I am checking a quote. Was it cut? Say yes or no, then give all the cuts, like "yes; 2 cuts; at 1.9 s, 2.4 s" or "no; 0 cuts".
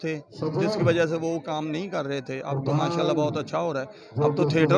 no; 0 cuts